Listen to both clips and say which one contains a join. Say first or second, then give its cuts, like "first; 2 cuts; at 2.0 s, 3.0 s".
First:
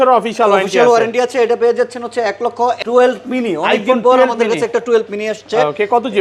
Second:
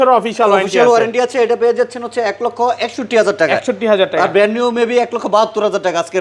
first; 1 cut; at 2.8 s